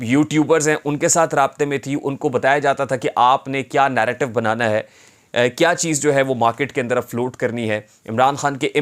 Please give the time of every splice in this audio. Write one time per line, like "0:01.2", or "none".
none